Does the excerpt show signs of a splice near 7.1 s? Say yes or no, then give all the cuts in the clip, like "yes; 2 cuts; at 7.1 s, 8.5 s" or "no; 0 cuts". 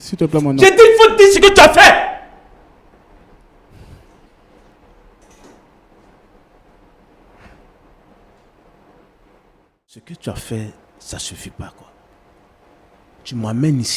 no; 1 cut; at 10.1 s